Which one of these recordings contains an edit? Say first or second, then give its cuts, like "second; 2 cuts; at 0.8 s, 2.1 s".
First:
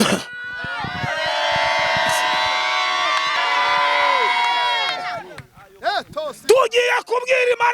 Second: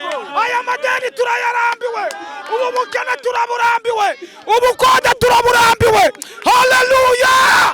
first; 1 cut; at 3.4 s